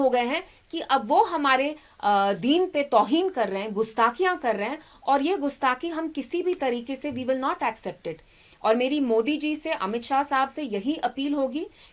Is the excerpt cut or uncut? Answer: uncut